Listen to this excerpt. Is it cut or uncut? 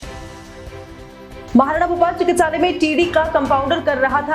cut